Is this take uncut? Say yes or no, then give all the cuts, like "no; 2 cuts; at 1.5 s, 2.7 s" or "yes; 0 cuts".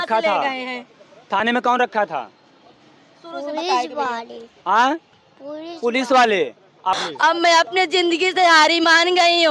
no; 1 cut; at 6.8 s